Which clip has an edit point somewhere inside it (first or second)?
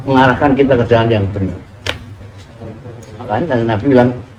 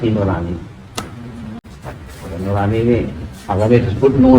second